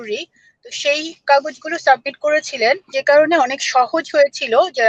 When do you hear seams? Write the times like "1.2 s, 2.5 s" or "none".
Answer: 3.0 s